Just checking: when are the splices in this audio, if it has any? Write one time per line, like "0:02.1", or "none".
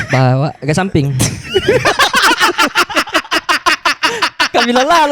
none